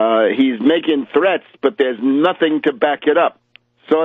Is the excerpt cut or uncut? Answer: cut